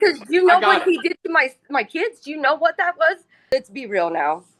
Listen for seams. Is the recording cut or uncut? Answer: cut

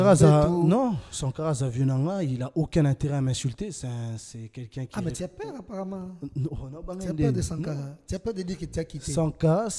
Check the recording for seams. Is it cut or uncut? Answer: uncut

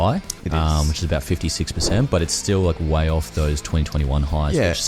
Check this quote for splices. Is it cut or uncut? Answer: uncut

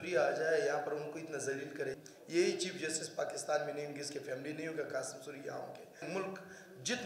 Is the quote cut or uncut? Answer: cut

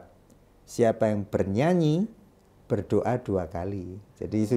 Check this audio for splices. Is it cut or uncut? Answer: uncut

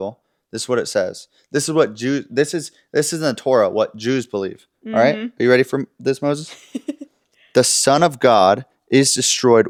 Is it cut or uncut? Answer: uncut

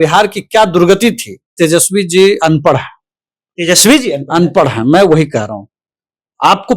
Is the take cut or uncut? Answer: cut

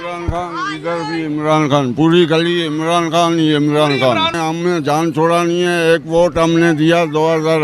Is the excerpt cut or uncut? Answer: cut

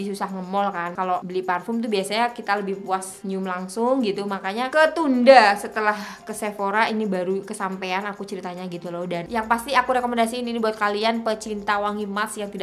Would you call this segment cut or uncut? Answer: cut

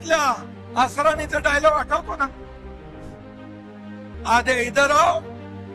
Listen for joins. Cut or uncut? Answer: cut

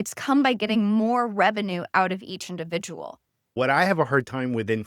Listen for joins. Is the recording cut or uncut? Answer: cut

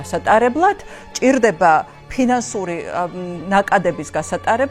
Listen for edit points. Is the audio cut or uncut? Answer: uncut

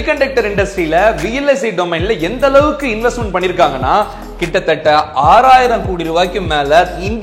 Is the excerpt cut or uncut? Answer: uncut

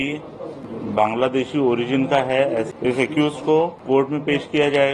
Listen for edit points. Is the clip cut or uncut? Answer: cut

